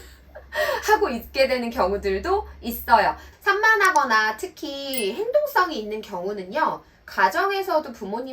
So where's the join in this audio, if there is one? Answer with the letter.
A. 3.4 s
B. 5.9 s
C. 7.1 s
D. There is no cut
A